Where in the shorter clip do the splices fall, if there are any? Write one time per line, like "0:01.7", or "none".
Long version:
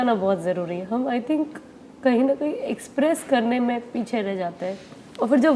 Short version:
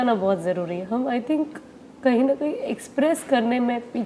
none